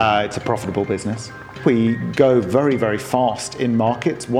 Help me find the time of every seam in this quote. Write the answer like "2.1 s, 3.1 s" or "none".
1.6 s